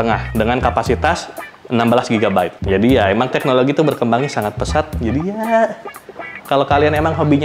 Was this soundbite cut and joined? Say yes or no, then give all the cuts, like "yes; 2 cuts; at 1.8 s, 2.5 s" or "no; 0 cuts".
yes; 1 cut; at 2.6 s